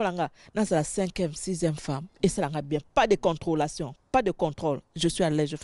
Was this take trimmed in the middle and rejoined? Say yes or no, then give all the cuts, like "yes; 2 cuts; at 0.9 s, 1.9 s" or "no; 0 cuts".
no; 0 cuts